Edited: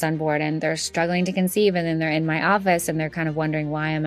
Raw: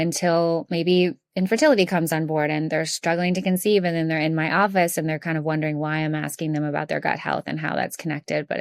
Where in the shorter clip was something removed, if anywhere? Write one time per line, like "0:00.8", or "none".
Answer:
none